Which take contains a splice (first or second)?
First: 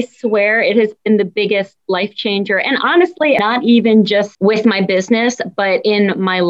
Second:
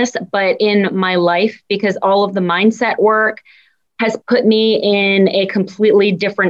first